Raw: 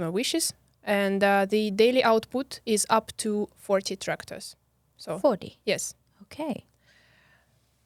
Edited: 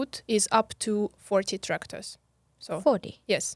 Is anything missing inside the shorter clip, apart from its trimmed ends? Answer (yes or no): no